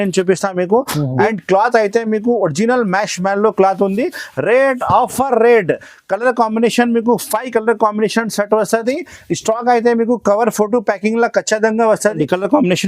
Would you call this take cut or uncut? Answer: cut